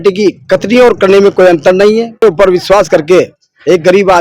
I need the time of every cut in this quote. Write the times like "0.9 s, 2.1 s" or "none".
2.2 s